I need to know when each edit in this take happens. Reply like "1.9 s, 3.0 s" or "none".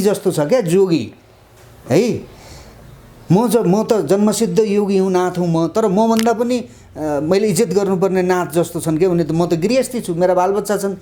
none